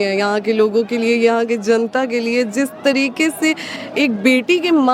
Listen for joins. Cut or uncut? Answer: uncut